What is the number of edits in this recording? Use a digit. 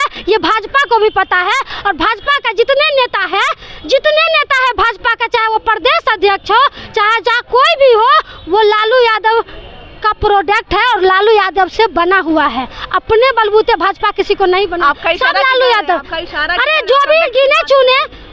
0